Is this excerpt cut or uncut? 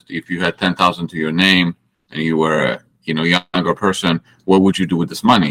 uncut